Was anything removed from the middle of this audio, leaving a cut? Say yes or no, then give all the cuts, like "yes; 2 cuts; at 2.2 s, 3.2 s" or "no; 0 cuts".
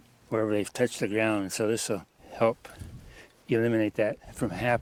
no; 0 cuts